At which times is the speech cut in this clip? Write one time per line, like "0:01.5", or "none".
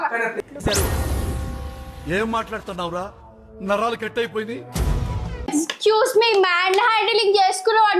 0:05.5